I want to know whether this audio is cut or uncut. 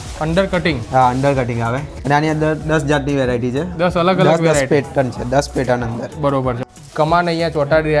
cut